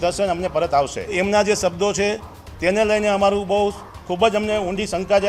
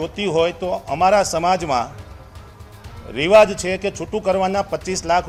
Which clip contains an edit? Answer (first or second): first